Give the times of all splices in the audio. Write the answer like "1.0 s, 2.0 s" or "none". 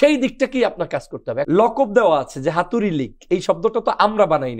1.3 s